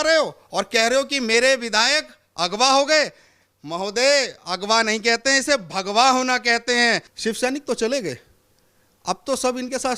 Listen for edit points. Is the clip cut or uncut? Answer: cut